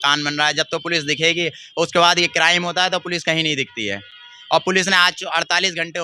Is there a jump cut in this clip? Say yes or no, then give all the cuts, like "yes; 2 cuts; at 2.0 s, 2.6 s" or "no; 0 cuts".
no; 0 cuts